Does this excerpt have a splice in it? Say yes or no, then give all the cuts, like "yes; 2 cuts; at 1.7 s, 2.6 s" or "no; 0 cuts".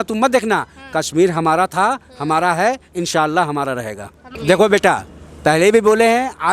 yes; 1 cut; at 4.3 s